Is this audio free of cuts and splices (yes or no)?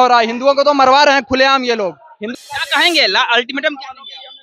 no